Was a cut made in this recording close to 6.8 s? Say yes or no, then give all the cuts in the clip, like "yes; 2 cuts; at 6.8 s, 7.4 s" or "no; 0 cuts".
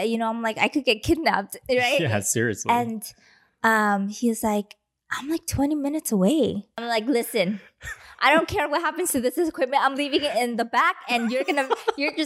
yes; 1 cut; at 6.8 s